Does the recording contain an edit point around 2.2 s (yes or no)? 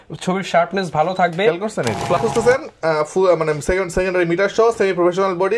yes